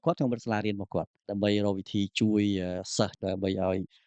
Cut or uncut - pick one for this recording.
cut